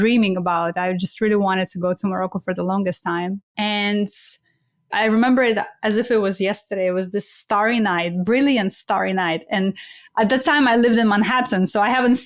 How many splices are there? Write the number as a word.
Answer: two